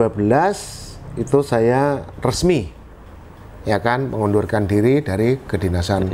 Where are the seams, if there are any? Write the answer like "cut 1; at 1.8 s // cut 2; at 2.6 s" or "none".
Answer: none